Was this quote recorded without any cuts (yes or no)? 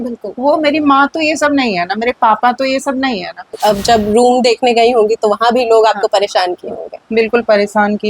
no